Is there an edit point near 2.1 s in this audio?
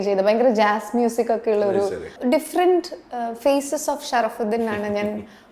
yes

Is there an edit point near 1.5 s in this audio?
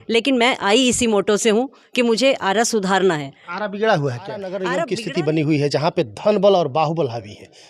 no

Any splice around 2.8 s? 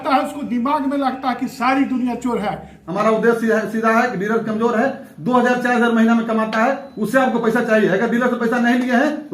yes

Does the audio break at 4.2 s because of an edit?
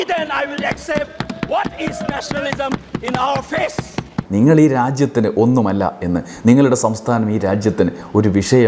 yes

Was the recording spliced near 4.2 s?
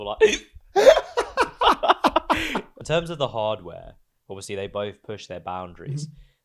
no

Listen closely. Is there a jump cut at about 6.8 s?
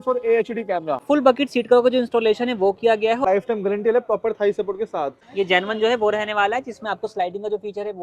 no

